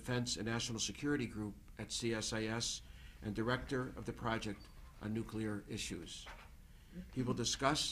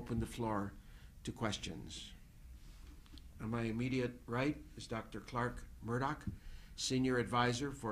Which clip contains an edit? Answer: first; 1 cut; at 5.5 s

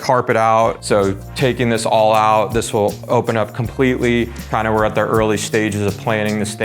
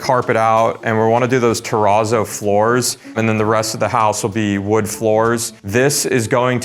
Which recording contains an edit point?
first; 2 cuts; at 0.8 s, 4.5 s

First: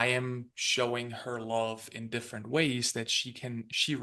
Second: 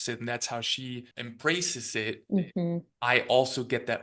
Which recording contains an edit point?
second; 1 cut; at 1.1 s

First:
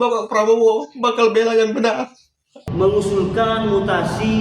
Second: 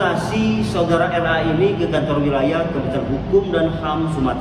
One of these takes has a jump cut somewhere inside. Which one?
first; 1 cut; at 2.6 s

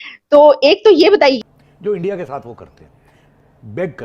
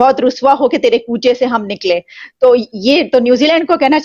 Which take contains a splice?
first; 1 cut; at 1.4 s

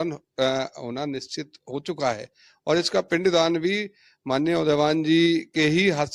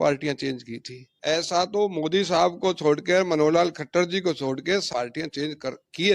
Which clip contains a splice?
second; 2 cuts; at 1.0 s, 4.9 s

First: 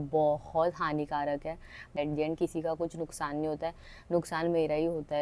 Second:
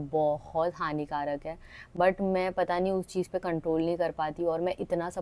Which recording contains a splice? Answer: first; 1 cut; at 1.9 s

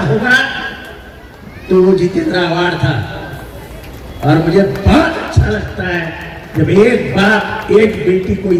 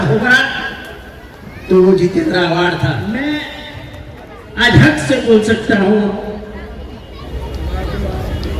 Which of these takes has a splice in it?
second; 1 cut; at 3.0 s

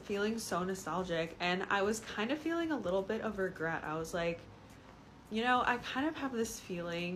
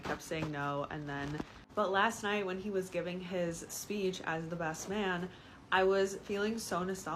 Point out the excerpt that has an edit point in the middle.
second; 1 cut; at 1.6 s

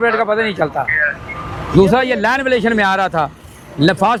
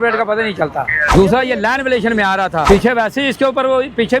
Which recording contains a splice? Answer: second; 2 cuts; at 1.0 s, 2.6 s

